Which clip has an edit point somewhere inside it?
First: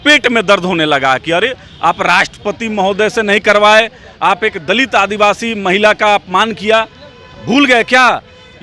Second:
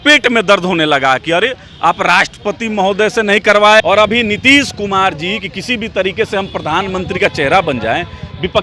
second; 1 cut; at 3.8 s

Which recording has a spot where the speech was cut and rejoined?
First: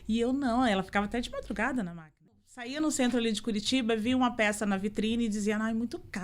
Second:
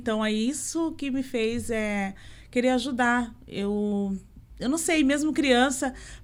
first; 1 cut; at 2.5 s

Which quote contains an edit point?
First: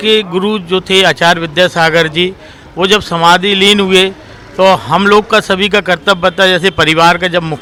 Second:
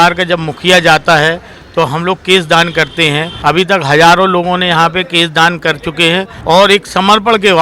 second; 2 cuts; at 3.3 s, 6.3 s

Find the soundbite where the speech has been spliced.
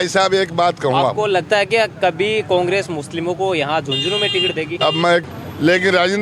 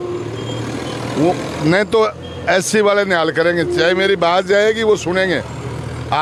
first; 1 cut; at 5.2 s

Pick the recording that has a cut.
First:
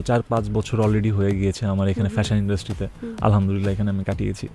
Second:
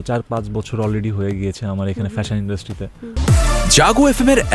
second; 1 cut; at 3.0 s

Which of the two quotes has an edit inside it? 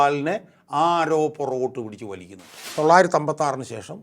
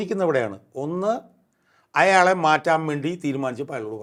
first; 1 cut; at 2.6 s

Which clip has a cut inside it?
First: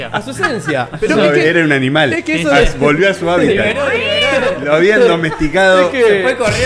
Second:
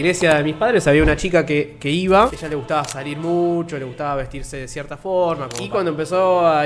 second; 2 cuts; at 2.4 s, 5.5 s

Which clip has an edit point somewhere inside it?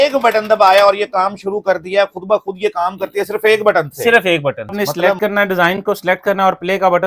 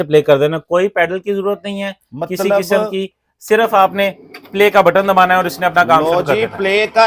first; 1 cut; at 4.7 s

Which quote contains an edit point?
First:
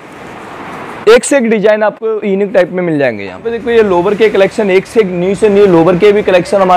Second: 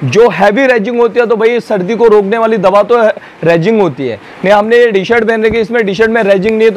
first; 1 cut; at 3.5 s

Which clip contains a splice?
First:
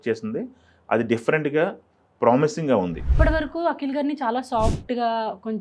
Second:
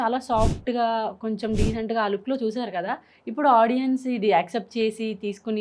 first; 1 cut; at 3.0 s

